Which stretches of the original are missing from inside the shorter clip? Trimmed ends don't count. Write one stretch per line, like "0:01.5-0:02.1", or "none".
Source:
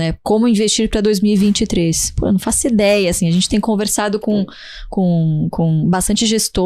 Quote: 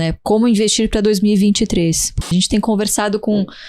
0:02.2-0:03.2